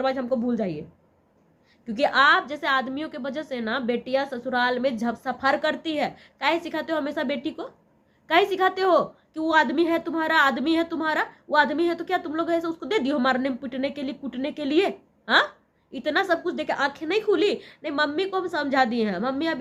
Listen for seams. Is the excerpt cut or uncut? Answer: uncut